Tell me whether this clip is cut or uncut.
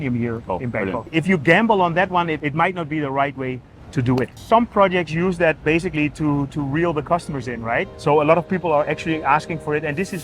cut